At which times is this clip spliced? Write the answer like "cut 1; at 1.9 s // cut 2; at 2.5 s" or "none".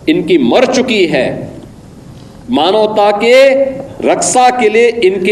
none